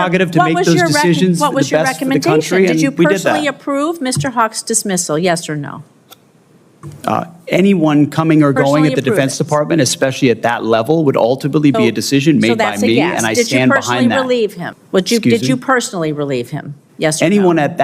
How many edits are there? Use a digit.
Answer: 1